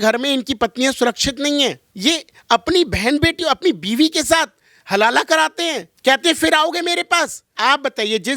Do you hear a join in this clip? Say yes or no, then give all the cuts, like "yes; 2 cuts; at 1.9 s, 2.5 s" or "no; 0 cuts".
yes; 2 cuts; at 1.9 s, 7.5 s